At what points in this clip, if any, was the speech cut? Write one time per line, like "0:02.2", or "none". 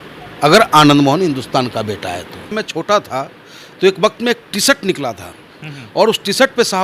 0:02.6